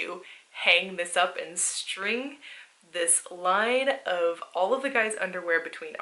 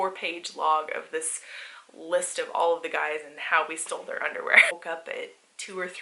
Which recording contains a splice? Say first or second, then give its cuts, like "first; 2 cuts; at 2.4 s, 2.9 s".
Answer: second; 1 cut; at 4.7 s